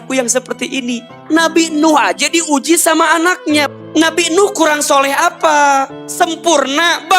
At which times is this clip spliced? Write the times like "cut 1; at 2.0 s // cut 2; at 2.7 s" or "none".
cut 1; at 1.1 s // cut 2; at 3.7 s // cut 3; at 6.0 s